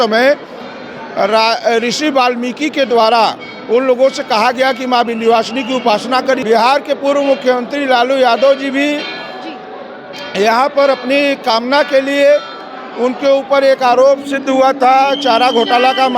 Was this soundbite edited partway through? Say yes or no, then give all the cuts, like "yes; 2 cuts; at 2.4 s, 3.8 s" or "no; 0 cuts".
yes; 1 cut; at 6.4 s